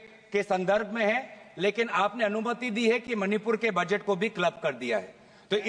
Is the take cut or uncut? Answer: uncut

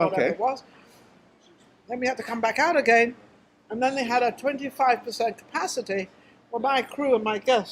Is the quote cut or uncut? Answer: cut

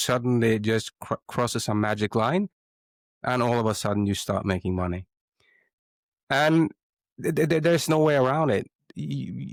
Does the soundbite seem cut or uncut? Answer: uncut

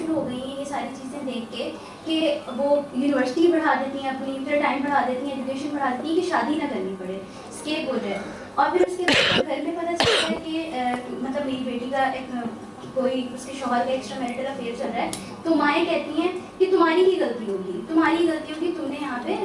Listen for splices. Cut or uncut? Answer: uncut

